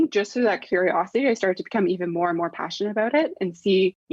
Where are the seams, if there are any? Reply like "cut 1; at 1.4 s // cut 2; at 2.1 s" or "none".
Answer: none